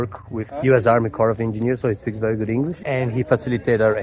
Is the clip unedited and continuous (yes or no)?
yes